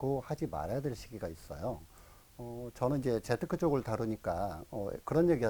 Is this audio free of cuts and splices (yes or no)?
yes